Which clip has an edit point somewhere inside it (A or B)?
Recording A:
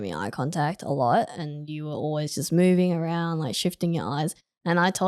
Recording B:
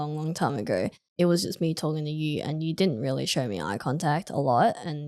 B